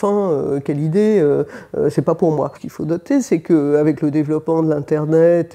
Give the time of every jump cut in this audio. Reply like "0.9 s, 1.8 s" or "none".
none